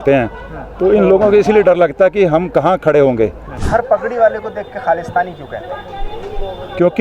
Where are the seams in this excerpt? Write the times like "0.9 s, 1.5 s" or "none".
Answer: 3.5 s